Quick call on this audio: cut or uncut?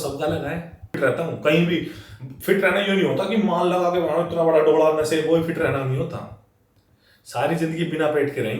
cut